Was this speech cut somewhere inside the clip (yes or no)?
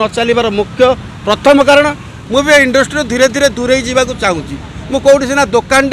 yes